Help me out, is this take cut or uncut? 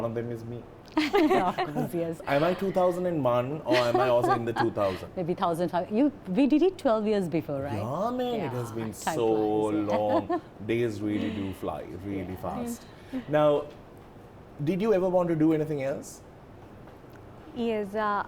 uncut